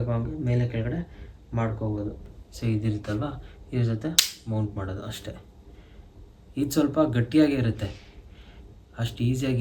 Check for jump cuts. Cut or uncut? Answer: cut